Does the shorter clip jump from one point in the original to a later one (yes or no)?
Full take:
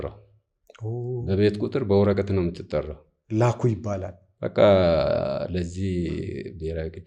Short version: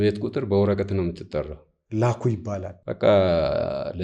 yes